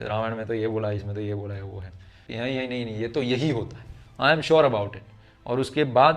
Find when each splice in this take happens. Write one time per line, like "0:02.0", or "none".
0:02.2